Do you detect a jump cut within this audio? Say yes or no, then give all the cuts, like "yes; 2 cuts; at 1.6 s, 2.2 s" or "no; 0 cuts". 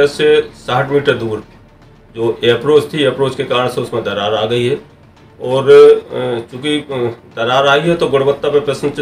no; 0 cuts